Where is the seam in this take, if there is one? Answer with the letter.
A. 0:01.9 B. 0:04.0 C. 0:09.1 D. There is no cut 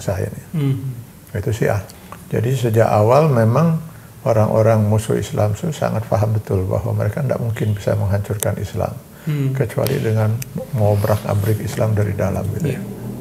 A